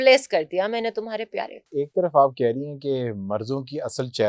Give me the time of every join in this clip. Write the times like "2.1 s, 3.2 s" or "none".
1.6 s